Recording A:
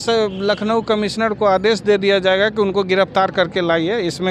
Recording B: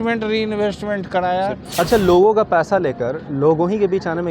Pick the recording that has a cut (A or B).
B